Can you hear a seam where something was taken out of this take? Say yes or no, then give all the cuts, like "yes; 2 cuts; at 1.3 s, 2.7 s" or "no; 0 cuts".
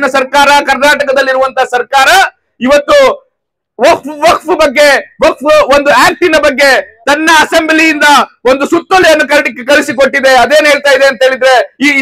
no; 0 cuts